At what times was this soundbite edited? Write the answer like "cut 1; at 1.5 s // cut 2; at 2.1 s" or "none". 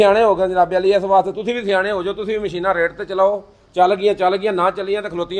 none

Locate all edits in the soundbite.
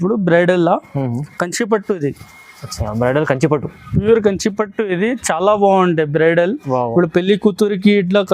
none

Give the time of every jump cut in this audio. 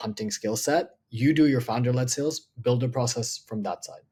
none

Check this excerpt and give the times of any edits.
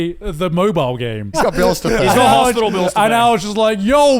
cut 1; at 1.3 s

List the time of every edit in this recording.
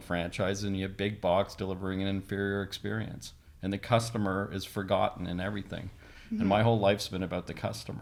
none

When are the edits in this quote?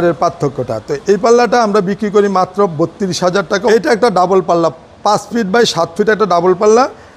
cut 1; at 3.7 s

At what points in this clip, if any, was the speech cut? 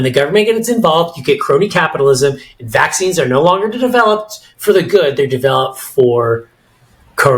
none

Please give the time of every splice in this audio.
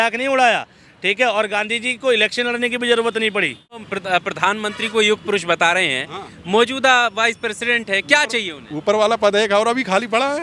cut 1; at 3.9 s

